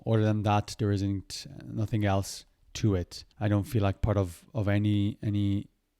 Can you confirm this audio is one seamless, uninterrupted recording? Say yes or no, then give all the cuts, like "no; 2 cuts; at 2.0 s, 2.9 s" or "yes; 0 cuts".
no; 1 cut; at 3.2 s